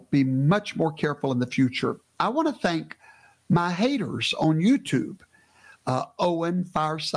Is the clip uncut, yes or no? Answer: yes